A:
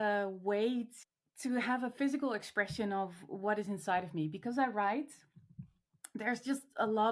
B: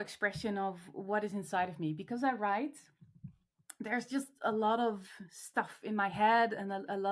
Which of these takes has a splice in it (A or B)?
A